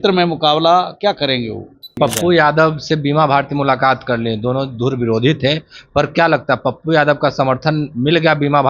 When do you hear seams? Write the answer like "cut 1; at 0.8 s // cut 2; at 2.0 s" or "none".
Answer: cut 1; at 1.9 s